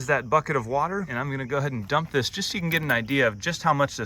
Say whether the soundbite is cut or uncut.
cut